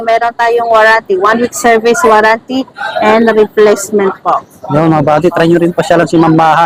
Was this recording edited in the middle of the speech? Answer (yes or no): no